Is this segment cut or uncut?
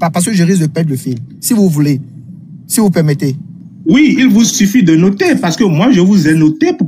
uncut